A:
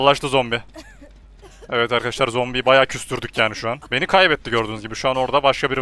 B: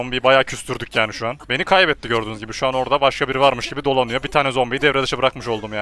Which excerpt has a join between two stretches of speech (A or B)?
A